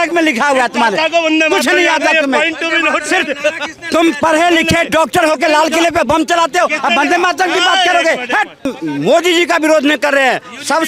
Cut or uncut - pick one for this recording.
cut